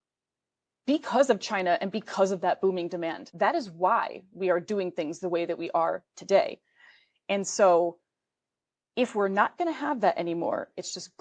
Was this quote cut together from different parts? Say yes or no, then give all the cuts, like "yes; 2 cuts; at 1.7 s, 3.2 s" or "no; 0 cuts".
yes; 1 cut; at 3.2 s